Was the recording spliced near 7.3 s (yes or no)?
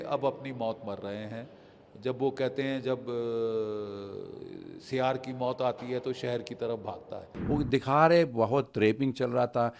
yes